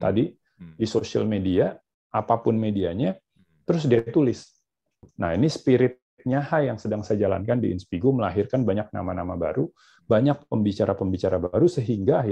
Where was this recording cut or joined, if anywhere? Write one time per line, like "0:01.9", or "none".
0:05.1

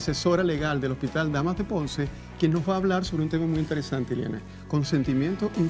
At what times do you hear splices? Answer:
none

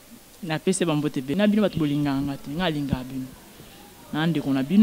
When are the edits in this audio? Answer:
0:01.3

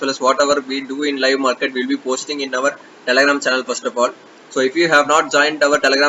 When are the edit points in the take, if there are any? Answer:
none

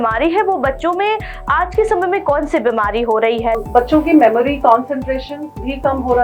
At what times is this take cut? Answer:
0:03.6

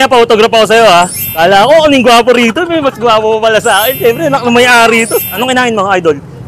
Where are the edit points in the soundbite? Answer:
0:01.2
0:05.4

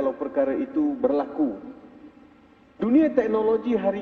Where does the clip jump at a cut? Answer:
none

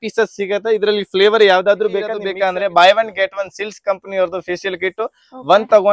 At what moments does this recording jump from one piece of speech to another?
0:02.2

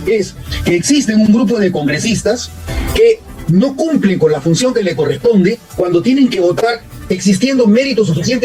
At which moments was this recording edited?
none

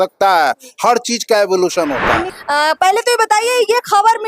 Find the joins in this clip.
0:02.2

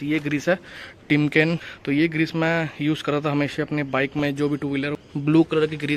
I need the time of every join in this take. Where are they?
0:01.7
0:04.9

